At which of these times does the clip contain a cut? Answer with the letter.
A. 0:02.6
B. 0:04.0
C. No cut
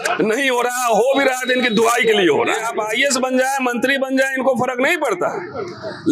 A